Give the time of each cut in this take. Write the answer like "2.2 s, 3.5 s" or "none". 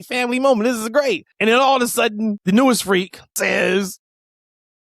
1.3 s, 2.4 s, 3.4 s